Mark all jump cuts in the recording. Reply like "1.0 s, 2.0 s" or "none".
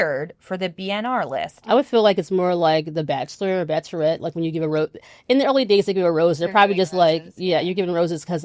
1.5 s